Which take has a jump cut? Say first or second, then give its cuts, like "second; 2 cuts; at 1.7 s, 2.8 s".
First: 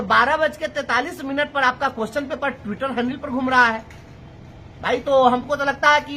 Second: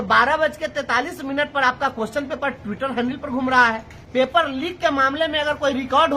second; 1 cut; at 4.3 s